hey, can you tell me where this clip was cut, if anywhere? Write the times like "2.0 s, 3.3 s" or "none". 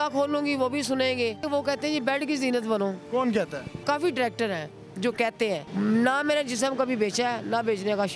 1.4 s, 3.8 s, 5.7 s